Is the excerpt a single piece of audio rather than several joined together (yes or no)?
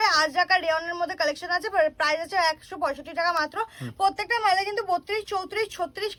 yes